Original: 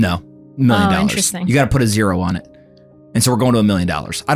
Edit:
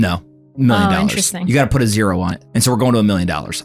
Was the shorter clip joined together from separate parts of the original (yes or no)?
yes